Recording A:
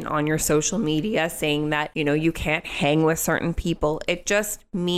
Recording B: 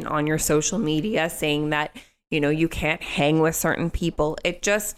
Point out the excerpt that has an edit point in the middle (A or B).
A